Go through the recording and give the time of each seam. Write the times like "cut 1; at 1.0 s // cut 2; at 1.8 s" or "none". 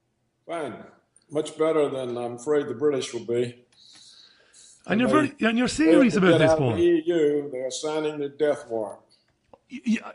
cut 1; at 8.5 s